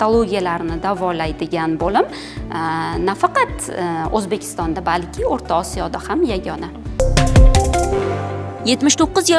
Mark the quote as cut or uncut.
uncut